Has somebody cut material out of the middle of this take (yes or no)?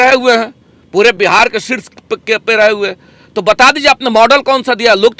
no